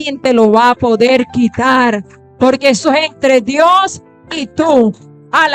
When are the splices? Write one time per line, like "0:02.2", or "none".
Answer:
none